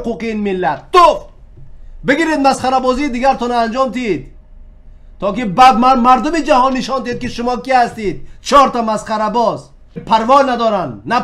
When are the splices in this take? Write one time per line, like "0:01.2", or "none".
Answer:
0:10.0